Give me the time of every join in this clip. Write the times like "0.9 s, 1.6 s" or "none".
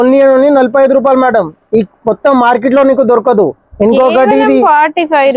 none